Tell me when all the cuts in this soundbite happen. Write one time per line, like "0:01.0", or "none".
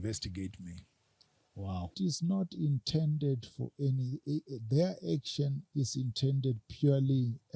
0:01.9